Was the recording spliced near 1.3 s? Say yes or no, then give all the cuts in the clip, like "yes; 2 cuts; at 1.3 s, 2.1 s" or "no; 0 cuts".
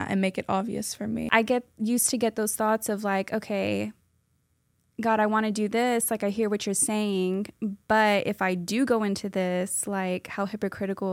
yes; 1 cut; at 1.3 s